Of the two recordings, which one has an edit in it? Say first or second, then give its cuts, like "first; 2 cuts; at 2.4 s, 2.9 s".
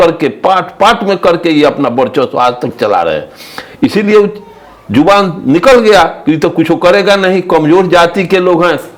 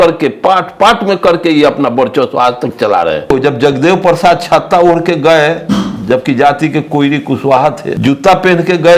second; 2 cuts; at 3.2 s, 7.9 s